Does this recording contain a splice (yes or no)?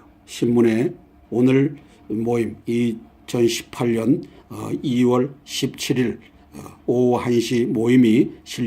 no